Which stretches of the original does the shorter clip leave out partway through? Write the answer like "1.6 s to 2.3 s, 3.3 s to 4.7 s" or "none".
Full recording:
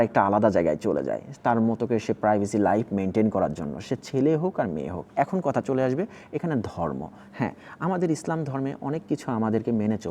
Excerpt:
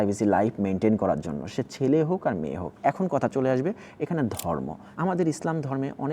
7.2 s to 7.7 s